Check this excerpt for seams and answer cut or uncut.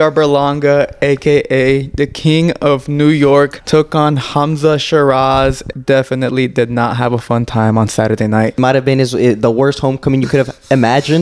cut